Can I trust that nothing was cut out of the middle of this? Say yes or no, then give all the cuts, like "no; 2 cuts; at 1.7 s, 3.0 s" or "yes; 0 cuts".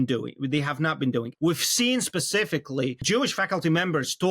no; 2 cuts; at 1.3 s, 3.0 s